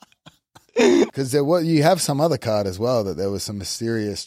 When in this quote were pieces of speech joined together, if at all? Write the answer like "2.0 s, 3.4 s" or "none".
1.2 s